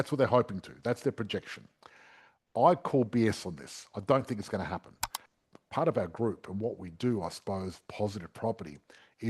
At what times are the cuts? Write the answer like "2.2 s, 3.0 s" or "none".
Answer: 5.4 s